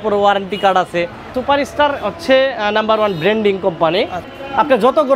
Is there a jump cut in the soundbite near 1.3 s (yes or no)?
yes